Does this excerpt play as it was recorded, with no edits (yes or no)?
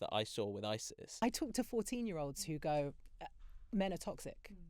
no